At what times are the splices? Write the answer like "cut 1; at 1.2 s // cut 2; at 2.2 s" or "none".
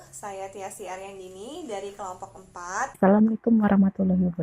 cut 1; at 2.9 s